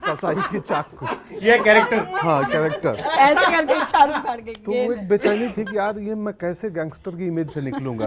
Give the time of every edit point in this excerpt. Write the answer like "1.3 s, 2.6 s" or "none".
none